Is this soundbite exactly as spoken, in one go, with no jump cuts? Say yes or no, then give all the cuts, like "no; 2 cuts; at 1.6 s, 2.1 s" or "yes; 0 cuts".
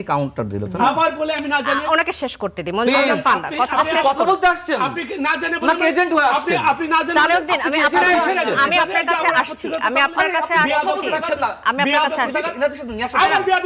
yes; 0 cuts